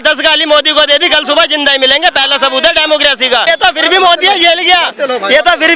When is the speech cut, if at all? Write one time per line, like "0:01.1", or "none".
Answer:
0:03.4